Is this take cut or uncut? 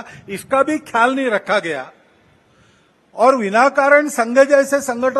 uncut